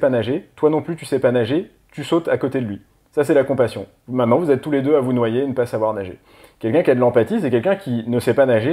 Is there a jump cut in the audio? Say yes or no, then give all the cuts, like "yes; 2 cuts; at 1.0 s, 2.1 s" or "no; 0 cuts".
no; 0 cuts